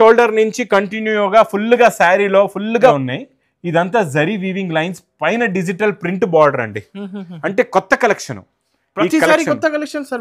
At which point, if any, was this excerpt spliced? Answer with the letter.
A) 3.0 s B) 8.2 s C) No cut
A